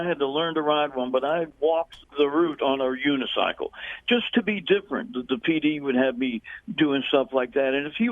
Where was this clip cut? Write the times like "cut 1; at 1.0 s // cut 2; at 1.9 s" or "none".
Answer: cut 1; at 1.5 s